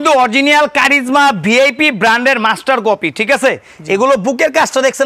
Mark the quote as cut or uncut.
uncut